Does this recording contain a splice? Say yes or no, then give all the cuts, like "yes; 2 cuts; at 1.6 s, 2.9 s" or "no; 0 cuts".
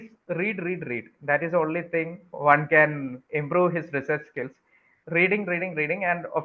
no; 0 cuts